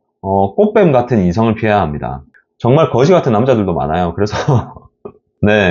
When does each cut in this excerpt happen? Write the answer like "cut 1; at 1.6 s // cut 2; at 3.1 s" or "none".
cut 1; at 2.4 s